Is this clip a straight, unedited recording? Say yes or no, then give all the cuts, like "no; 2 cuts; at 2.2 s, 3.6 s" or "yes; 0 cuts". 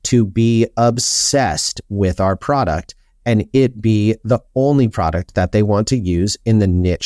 yes; 0 cuts